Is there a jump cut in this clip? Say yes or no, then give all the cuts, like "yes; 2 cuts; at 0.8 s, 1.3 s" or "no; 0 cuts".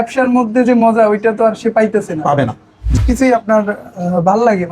yes; 1 cut; at 3.0 s